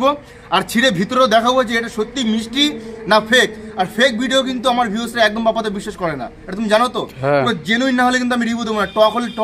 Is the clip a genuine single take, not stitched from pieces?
yes; 0 cuts

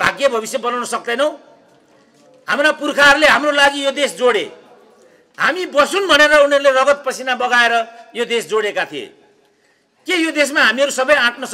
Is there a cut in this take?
no; 0 cuts

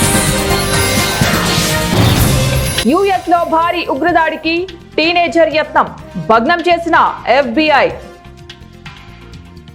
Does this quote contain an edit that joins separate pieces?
no; 0 cuts

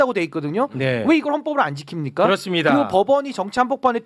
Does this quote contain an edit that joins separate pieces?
no; 0 cuts

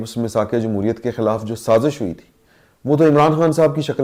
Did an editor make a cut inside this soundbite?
no; 0 cuts

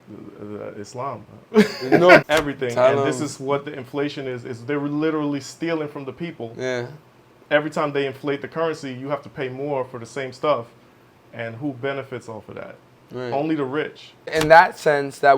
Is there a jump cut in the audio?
yes; 2 cuts; at 2.2 s, 14.3 s

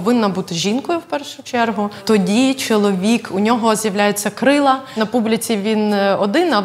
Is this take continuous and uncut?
no; 2 cuts; at 2.0 s, 4.9 s

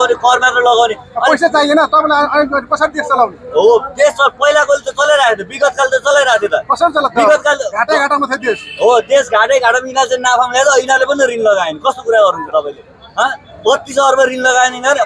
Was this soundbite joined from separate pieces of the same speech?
no; 0 cuts

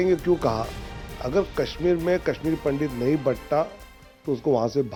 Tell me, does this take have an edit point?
no; 0 cuts

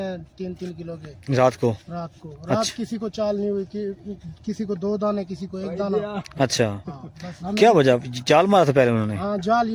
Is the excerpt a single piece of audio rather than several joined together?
yes; 0 cuts

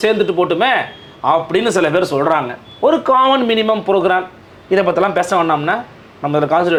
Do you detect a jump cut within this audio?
no; 0 cuts

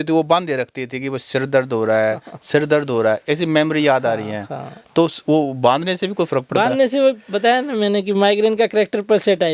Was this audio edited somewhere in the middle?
no; 0 cuts

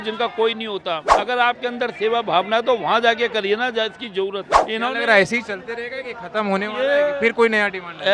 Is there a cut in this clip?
yes; 2 cuts; at 1.1 s, 4.4 s

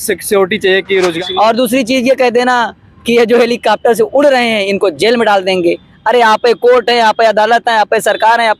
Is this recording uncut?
no; 1 cut; at 1.2 s

